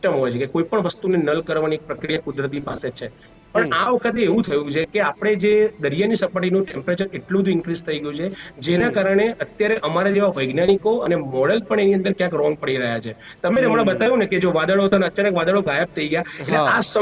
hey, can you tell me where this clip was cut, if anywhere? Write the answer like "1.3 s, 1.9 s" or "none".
none

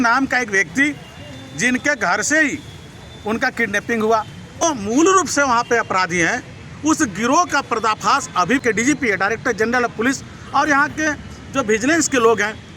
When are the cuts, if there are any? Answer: 4.6 s, 8.6 s

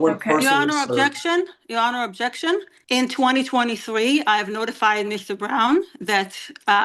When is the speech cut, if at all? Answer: 2.7 s

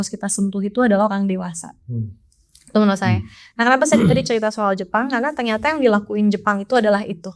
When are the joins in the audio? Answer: none

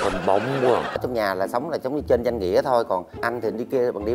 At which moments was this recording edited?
1.0 s, 3.2 s

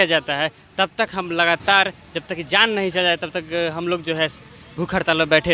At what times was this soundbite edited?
none

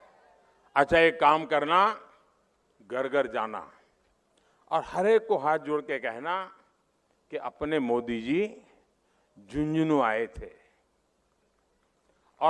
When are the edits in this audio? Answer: none

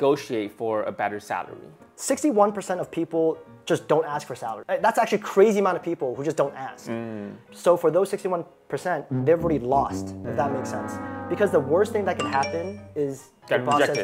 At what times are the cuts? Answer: 1.7 s

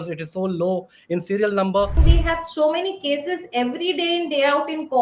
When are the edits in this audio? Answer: 2.0 s

